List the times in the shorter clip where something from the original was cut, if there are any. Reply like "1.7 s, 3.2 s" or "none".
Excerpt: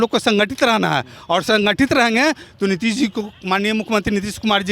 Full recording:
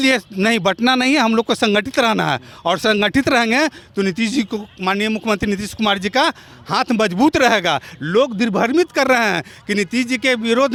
none

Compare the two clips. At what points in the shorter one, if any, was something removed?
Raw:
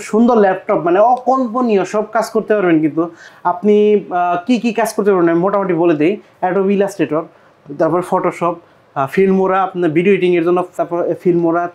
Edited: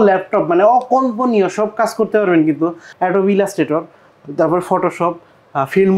2.9 s

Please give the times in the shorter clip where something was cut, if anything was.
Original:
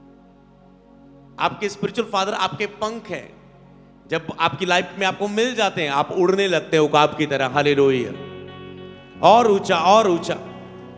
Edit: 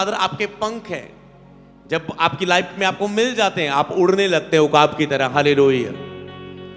none

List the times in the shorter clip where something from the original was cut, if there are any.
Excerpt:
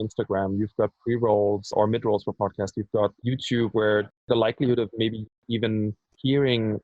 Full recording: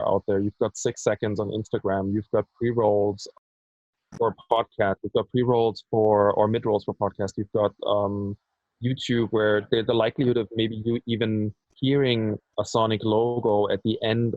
1.7 s, 3.2 s

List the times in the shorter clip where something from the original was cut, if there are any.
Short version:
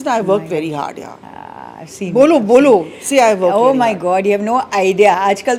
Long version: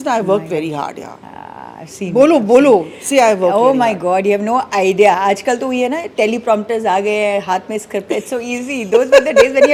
none

